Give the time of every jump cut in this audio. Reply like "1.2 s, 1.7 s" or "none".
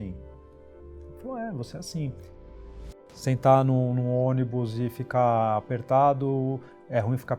2.7 s